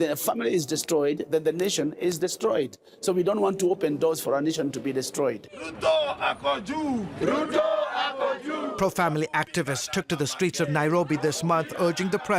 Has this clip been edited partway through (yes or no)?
yes